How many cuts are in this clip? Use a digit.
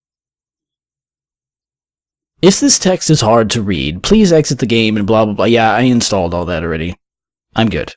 1